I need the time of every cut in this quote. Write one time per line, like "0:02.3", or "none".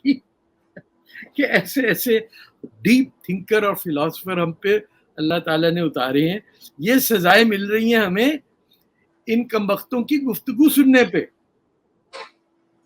none